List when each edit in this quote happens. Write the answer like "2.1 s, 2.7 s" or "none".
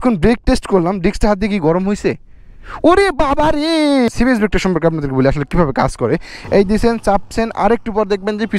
4.1 s, 6.3 s